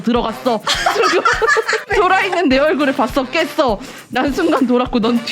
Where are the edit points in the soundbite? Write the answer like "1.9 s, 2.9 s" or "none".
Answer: 1.8 s